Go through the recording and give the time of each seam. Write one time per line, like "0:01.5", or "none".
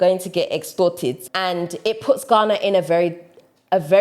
0:01.3